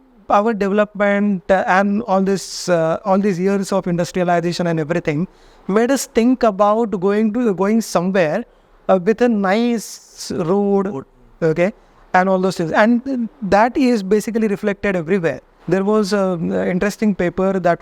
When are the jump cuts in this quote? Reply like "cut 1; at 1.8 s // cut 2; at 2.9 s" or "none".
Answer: cut 1; at 15.5 s